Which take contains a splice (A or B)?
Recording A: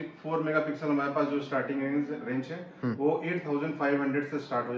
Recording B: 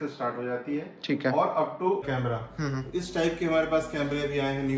B